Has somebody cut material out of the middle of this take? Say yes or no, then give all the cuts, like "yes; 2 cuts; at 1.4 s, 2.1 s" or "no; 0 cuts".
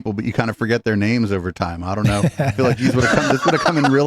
no; 0 cuts